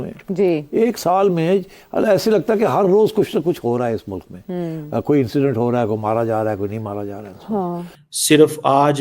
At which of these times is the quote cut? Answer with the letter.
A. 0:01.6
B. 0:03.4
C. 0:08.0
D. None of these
C